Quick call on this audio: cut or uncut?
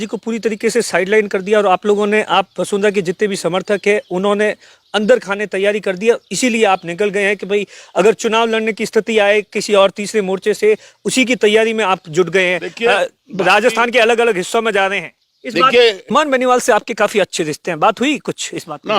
cut